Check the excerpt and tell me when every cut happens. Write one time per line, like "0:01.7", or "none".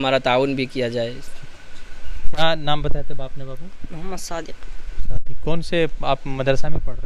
none